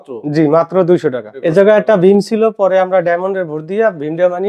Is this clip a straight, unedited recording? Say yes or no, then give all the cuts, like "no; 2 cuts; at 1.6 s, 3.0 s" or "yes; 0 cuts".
no; 1 cut; at 1.3 s